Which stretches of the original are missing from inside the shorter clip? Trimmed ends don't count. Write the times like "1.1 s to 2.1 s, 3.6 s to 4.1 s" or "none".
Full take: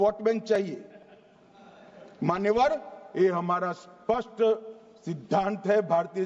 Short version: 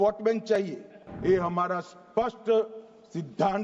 1.0 s to 3.0 s